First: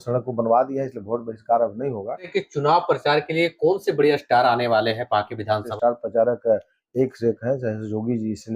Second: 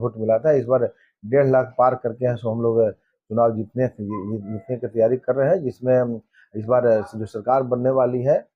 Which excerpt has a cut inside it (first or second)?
first